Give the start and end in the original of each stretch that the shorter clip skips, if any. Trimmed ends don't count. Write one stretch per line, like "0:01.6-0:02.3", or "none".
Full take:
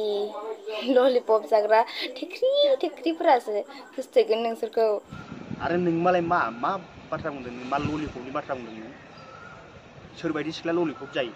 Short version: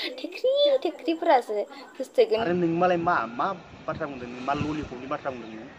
0:04.4-0:05.7